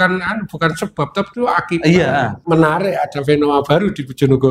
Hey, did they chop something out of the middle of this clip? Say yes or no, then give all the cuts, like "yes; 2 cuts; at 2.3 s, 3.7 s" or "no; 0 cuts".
yes; 1 cut; at 2.4 s